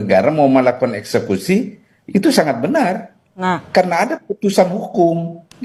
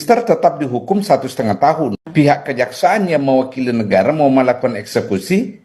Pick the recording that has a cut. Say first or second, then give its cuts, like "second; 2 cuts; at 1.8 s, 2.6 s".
second; 1 cut; at 2.0 s